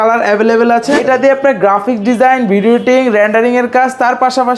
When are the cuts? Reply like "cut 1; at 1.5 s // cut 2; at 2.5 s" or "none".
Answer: cut 1; at 1.0 s